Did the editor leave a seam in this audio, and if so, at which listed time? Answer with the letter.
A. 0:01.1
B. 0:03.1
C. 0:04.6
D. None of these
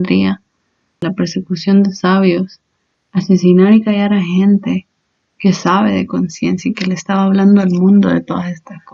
A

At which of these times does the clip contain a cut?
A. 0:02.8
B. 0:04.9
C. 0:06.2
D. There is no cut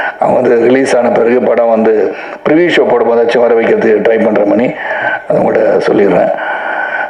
D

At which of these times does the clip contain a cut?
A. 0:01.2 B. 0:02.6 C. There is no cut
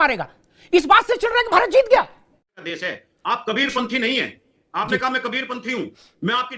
B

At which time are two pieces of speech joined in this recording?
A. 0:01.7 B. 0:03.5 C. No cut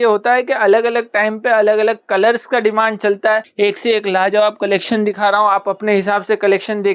B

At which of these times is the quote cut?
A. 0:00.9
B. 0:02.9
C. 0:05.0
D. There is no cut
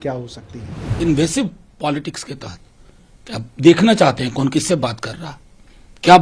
A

